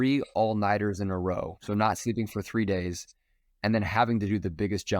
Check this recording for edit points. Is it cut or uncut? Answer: cut